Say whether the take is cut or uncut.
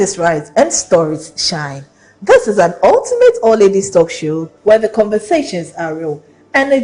cut